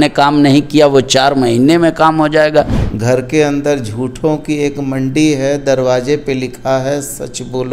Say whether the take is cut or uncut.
cut